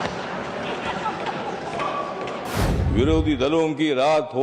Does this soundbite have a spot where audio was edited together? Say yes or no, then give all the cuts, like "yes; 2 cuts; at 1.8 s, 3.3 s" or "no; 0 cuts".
yes; 1 cut; at 2.6 s